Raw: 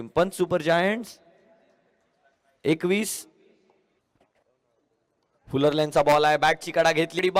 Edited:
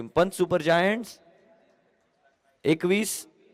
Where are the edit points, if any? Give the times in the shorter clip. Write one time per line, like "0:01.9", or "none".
none

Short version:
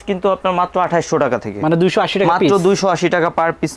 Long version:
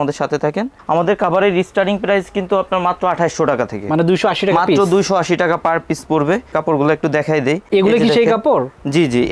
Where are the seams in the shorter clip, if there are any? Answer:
none

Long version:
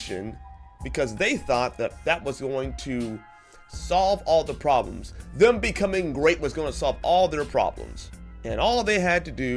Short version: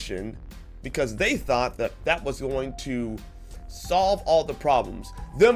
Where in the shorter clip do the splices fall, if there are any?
none

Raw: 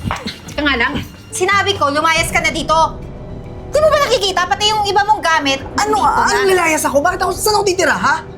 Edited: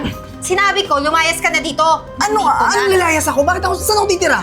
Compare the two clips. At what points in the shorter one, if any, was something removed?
0:02.1

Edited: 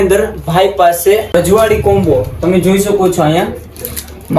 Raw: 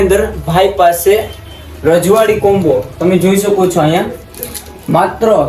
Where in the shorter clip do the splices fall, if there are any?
0:01.3

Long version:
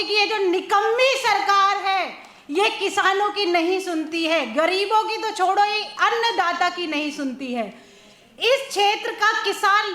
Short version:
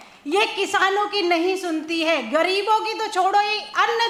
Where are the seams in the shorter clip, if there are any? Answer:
none

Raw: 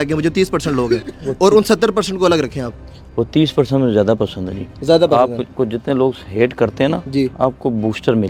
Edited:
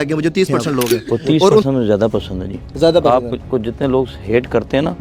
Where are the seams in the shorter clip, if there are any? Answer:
0:01.6

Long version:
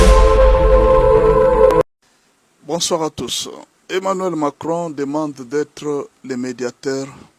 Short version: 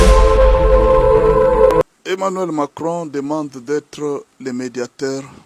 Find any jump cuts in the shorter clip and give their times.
0:02.0

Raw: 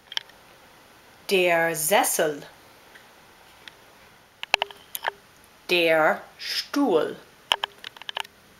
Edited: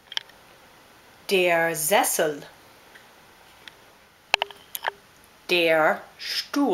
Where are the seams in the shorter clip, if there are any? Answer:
0:04.3

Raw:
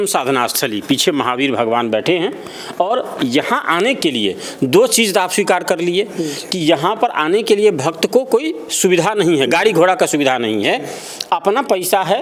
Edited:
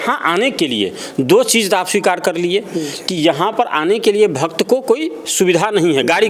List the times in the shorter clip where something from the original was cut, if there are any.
none

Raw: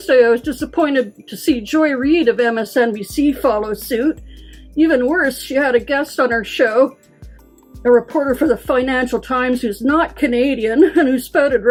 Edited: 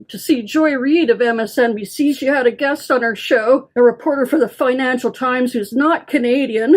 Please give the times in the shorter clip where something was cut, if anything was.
0:02.2
0:03.7

